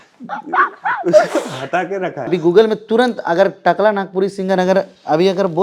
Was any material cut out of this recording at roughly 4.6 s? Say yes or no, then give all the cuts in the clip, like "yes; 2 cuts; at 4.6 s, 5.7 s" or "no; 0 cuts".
no; 1 cut; at 2.3 s